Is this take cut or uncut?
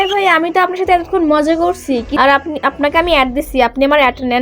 cut